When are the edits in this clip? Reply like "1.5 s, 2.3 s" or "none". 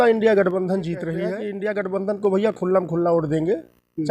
1.2 s

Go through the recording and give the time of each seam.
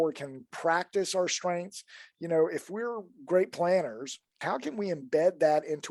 4.3 s

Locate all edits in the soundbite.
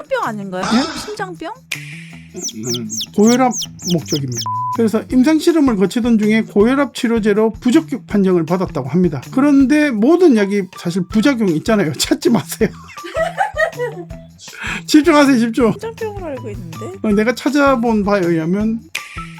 2.2 s, 4.4 s

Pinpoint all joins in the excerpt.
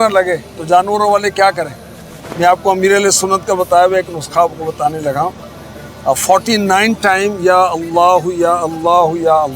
none

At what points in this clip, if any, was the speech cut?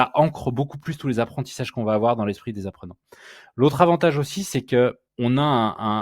5.1 s

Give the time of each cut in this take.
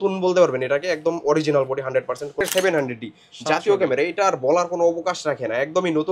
2.4 s

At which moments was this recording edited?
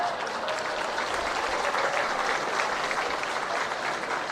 2.0 s

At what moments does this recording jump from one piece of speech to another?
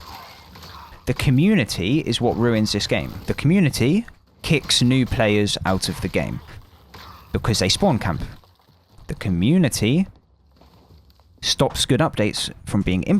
3.2 s

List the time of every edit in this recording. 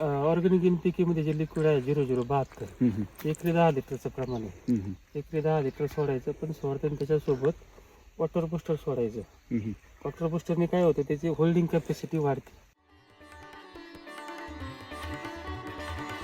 none

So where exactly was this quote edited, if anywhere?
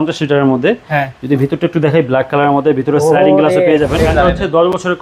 4.0 s

